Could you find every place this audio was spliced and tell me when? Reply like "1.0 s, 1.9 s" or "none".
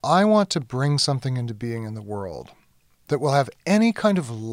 none